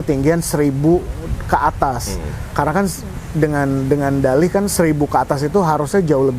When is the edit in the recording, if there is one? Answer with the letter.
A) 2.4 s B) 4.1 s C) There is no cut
C